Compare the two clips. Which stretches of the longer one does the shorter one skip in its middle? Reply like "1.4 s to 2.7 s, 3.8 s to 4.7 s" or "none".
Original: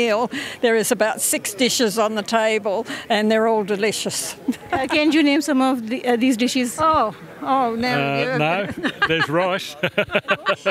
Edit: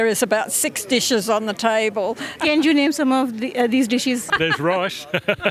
3.1 s to 4.9 s, 6.8 s to 9.0 s